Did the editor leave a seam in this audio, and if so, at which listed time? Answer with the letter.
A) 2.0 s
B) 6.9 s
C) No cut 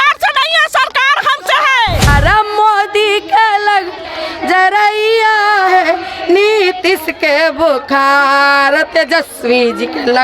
A